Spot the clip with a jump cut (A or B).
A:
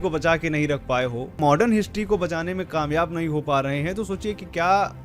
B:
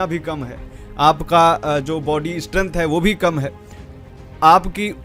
A